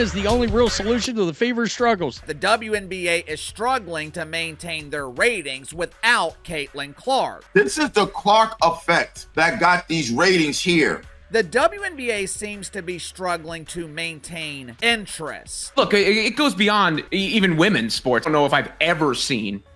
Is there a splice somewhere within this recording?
yes; 7 cuts; at 2.2 s, 7.4 s, 11.1 s, 14.7 s, 15.6 s, 17.0 s, 18.2 s

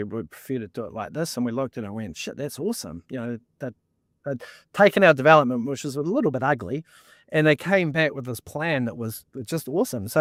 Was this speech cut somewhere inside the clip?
no; 0 cuts

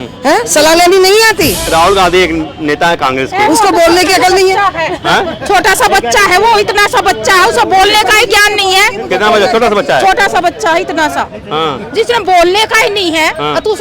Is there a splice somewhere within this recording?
yes; 1 cut; at 1.6 s

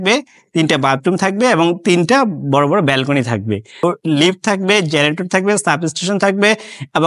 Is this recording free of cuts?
no; 1 cut; at 3.8 s

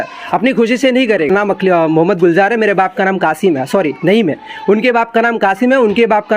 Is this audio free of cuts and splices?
no; 1 cut; at 1.3 s

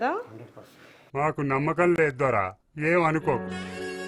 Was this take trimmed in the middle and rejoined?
no; 0 cuts

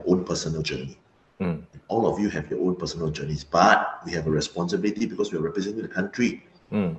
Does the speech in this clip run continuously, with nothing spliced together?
yes; 0 cuts

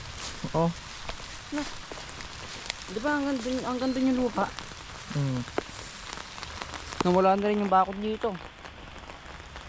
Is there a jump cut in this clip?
no; 0 cuts

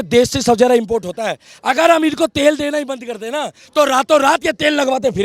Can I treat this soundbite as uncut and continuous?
yes; 0 cuts

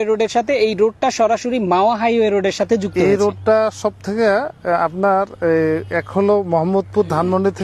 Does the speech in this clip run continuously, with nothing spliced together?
yes; 0 cuts

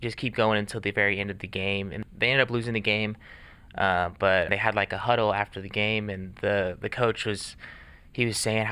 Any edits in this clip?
yes; 2 cuts; at 2.0 s, 4.5 s

